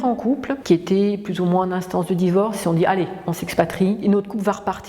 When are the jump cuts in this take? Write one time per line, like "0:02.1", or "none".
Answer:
0:04.0